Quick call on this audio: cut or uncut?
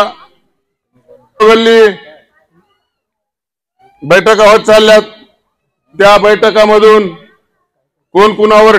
cut